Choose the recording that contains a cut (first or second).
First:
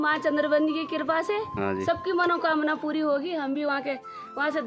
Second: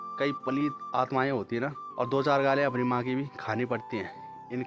second